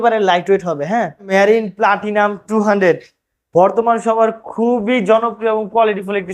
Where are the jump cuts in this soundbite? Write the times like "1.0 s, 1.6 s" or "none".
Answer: 1.3 s